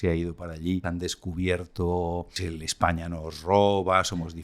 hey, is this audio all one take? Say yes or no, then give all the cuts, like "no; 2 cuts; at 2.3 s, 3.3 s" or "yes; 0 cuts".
no; 2 cuts; at 0.8 s, 2.4 s